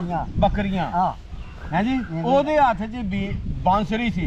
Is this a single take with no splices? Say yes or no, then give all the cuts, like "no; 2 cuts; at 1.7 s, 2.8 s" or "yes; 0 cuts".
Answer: yes; 0 cuts